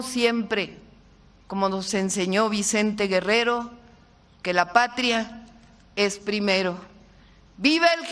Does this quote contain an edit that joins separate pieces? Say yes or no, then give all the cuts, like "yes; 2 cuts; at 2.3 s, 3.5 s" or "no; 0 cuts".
no; 0 cuts